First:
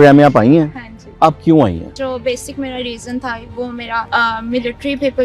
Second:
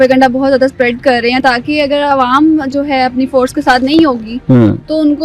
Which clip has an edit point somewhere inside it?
first; 2 cuts; at 1.9 s, 4.1 s

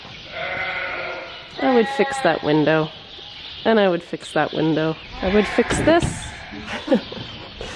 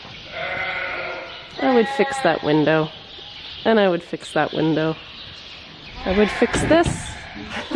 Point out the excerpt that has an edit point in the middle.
first; 1 cut; at 5.1 s

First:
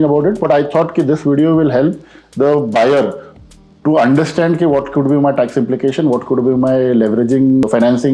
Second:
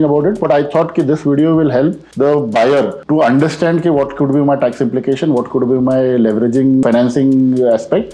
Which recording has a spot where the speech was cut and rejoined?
second; 3 cuts; at 2.0 s, 3.0 s, 6.8 s

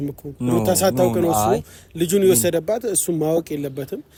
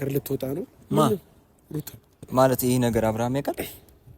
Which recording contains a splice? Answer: second; 1 cut; at 2.2 s

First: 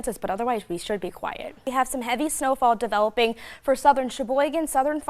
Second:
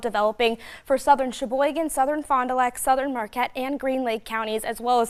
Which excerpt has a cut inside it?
first; 1 cut; at 1.7 s

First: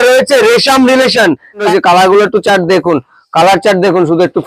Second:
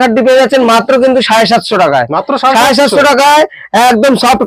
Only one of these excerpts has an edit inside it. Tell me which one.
first; 1 cut; at 1.6 s

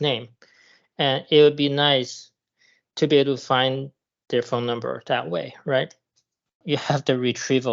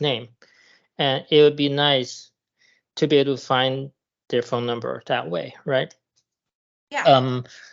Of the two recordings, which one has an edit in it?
first; 1 cut; at 6.6 s

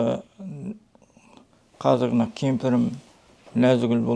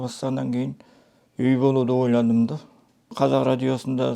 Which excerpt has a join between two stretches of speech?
second; 1 cut; at 3.1 s

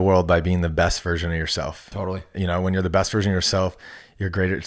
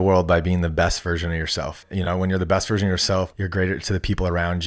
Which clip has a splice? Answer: second; 2 cuts; at 1.8 s, 3.4 s

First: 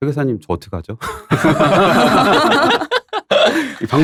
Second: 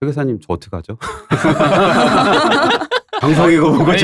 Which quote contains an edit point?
second; 1 cut; at 3.1 s

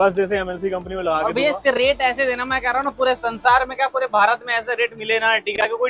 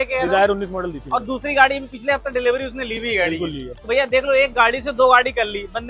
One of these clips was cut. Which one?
second; 1 cut; at 3.8 s

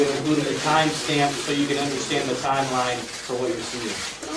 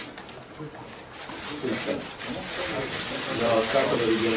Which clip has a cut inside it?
first; 1 cut; at 1.9 s

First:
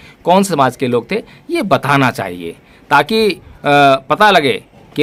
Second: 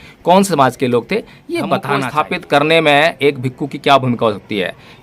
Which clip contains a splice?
second; 1 cut; at 2.1 s

